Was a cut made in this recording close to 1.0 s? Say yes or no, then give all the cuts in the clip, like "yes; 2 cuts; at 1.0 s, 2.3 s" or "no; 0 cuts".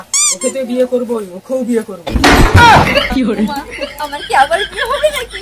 no; 1 cut; at 3.1 s